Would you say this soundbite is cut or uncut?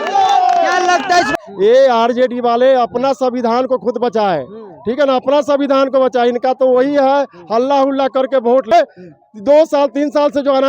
cut